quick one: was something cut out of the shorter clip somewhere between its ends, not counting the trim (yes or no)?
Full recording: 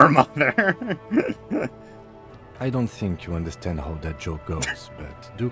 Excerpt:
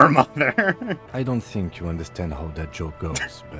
yes